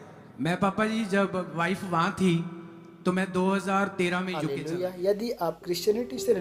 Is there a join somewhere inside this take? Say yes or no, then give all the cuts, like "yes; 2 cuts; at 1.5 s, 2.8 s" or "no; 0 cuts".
yes; 1 cut; at 4.4 s